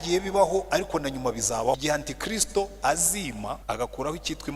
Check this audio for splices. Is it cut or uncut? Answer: cut